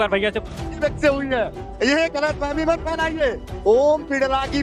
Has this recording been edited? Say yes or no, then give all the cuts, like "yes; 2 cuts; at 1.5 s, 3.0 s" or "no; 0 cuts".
no; 0 cuts